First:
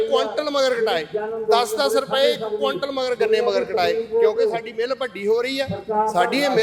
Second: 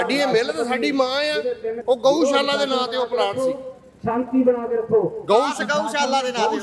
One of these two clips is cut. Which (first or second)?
second